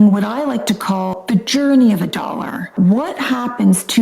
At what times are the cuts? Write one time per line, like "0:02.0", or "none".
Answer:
0:01.2
0:02.6